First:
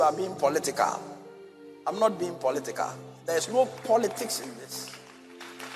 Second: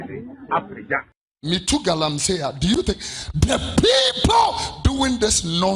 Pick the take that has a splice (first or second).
second